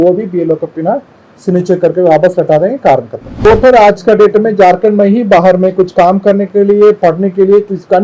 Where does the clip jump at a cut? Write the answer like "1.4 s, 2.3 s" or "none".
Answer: 3.4 s